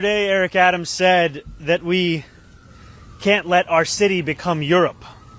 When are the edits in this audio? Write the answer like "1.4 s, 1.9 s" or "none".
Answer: none